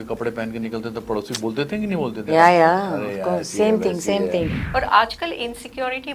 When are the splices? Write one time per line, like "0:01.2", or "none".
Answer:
0:04.6